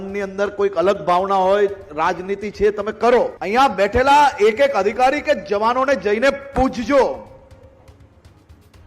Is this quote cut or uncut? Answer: cut